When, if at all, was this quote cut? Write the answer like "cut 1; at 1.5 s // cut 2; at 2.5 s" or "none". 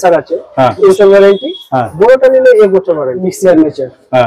cut 1; at 0.9 s // cut 2; at 3.2 s